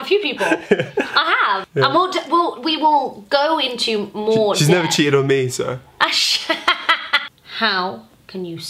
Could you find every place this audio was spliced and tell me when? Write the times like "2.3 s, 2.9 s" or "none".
1.7 s, 7.3 s